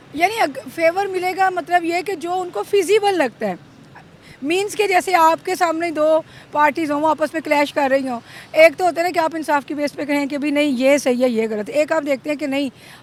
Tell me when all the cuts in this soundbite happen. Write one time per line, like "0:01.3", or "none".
none